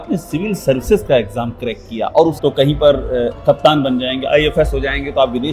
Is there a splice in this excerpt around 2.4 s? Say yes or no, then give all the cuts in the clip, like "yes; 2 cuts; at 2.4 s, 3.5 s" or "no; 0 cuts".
yes; 1 cut; at 2.4 s